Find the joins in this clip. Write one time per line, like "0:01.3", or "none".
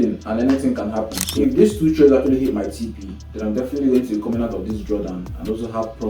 0:01.2